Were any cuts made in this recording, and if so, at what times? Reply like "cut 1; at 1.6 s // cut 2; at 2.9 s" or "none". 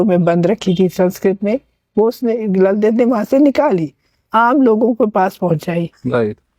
none